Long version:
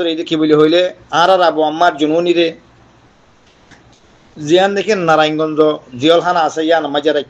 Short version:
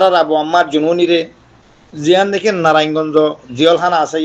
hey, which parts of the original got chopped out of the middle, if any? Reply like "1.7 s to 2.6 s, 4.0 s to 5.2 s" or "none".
2.4 s to 3.6 s